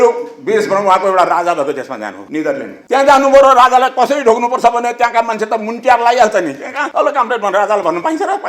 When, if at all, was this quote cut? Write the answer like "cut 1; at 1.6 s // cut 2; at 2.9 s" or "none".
none